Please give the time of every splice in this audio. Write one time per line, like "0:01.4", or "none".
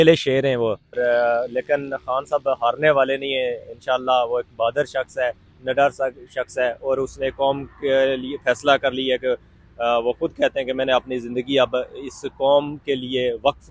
0:01.0

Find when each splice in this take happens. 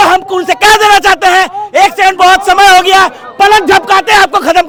none

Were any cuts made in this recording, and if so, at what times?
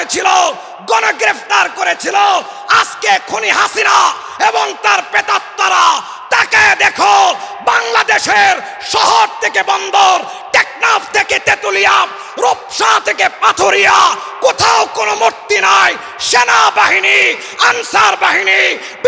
none

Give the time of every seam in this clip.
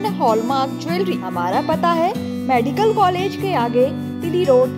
0:01.2

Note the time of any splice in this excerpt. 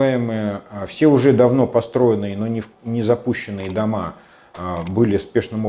none

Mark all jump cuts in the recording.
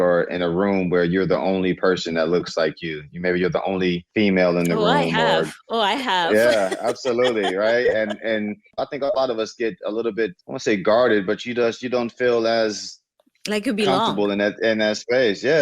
0:08.8

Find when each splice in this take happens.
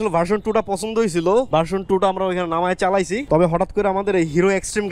0:01.5

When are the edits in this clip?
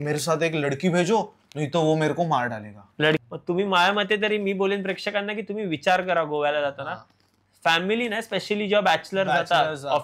0:03.2

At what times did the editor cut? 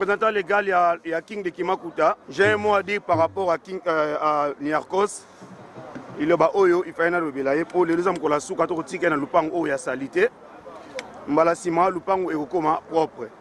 0:02.2

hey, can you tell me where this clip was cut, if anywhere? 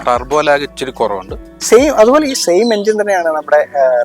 0:01.5

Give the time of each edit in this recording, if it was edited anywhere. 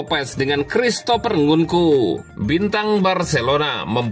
0:02.3

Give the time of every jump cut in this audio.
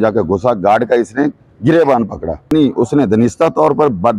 0:02.7

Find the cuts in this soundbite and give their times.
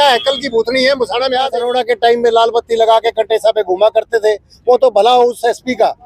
0:01.6

